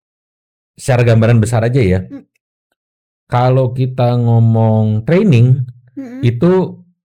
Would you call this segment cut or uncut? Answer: uncut